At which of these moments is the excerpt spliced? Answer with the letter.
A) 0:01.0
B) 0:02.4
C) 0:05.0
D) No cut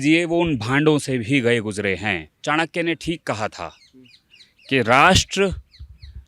B